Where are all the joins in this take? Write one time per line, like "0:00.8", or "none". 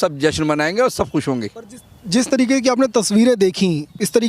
none